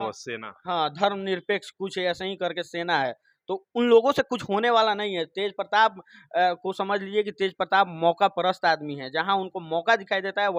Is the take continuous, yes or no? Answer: yes